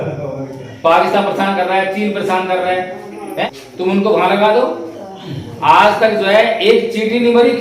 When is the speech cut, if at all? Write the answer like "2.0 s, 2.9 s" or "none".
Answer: 3.3 s